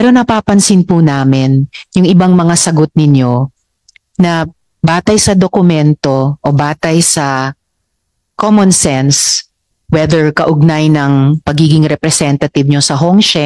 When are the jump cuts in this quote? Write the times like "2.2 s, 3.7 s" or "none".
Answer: none